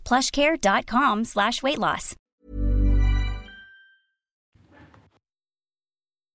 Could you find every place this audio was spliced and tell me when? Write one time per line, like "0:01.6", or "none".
none